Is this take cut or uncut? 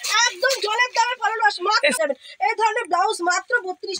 cut